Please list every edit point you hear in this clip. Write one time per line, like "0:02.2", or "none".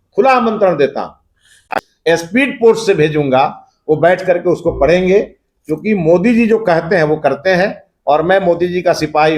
none